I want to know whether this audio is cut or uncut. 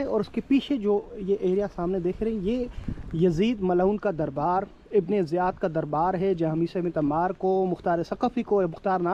uncut